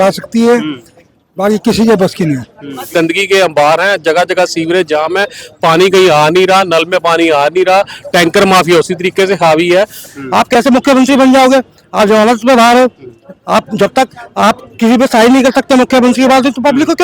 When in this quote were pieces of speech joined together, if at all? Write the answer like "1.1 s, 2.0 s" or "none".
2.9 s, 10.1 s